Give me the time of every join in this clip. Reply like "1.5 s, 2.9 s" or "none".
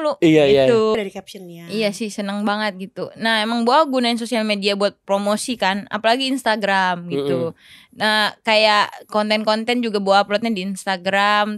0.9 s